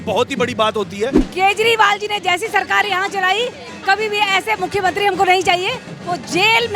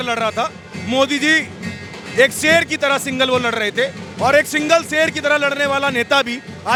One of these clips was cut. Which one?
first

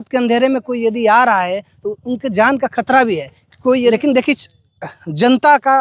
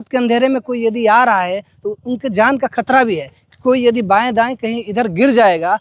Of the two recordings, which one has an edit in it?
first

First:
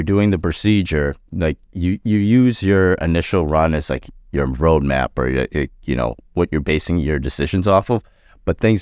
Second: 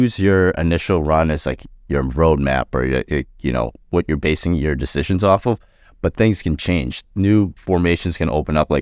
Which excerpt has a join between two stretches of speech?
second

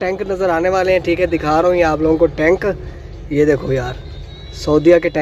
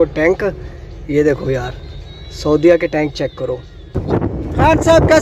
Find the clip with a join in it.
second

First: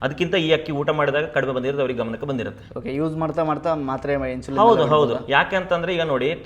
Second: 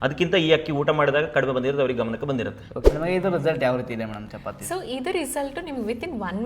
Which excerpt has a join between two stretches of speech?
second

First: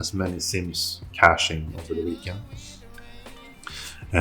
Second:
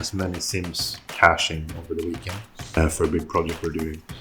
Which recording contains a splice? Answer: second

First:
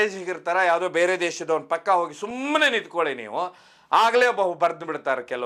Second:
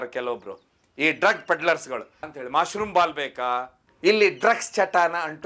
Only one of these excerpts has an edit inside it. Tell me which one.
second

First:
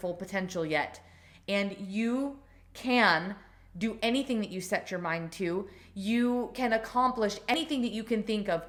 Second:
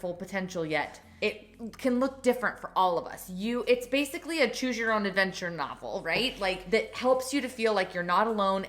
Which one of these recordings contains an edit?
second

